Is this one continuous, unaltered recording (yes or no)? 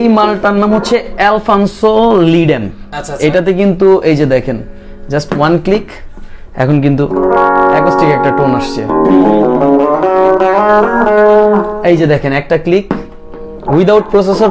yes